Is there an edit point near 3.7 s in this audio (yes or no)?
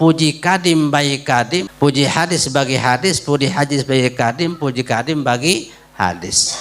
no